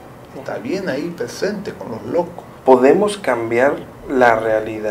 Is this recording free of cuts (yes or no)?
no